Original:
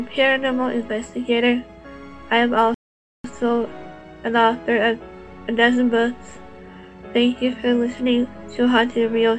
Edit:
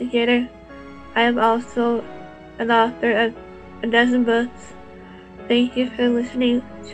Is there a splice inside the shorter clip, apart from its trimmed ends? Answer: yes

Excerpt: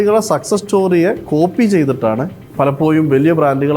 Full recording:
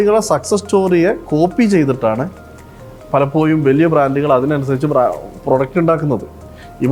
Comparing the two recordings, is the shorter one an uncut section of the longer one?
no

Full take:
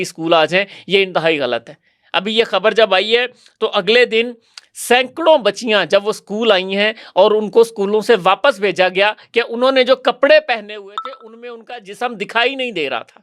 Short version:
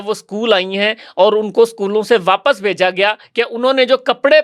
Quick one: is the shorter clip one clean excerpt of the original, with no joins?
yes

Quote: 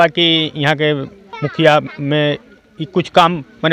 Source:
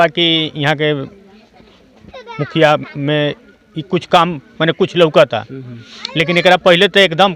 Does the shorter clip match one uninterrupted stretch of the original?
no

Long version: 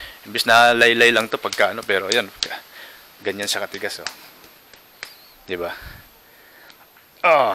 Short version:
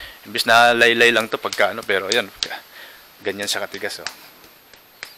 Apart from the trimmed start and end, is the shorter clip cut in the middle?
no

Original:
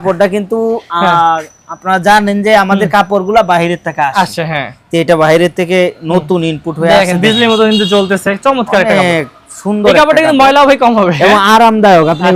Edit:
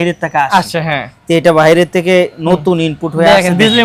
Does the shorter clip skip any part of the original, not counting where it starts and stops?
no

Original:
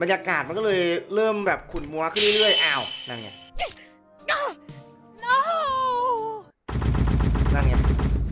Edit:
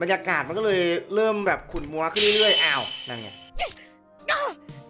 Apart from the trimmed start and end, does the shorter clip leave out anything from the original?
no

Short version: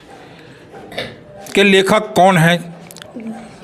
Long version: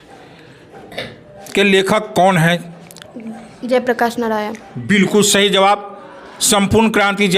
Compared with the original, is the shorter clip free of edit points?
yes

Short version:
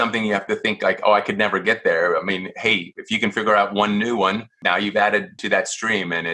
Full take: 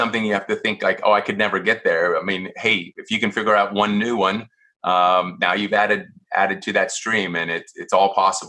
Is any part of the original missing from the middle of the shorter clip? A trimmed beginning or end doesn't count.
yes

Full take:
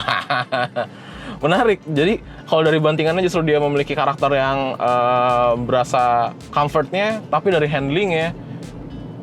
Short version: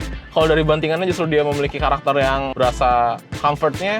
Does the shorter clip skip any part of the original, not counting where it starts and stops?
yes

